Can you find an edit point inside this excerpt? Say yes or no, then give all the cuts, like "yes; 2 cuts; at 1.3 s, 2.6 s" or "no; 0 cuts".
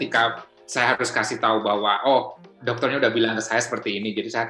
no; 0 cuts